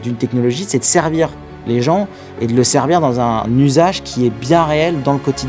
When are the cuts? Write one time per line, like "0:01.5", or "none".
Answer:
0:03.5